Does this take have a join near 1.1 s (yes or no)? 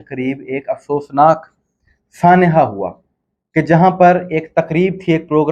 no